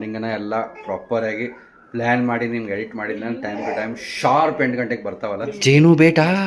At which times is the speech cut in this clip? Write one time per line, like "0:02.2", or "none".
0:05.5